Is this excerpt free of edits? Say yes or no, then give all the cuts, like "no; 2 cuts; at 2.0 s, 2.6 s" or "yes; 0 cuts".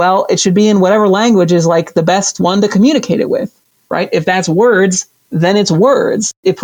yes; 0 cuts